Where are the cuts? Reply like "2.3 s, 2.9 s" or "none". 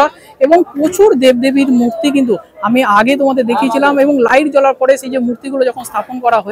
none